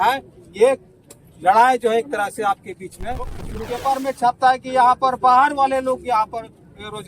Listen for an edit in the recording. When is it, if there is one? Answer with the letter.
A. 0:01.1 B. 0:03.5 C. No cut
B